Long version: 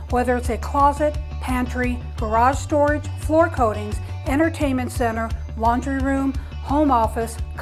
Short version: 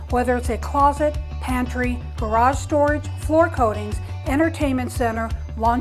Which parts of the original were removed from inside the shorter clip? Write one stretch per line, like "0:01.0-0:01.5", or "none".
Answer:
none